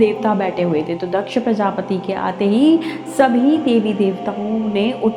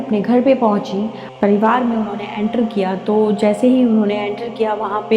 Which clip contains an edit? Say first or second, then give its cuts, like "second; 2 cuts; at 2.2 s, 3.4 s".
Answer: second; 1 cut; at 1.2 s